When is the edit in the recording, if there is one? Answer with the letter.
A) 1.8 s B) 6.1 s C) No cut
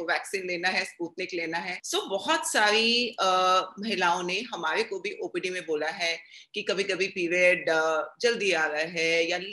A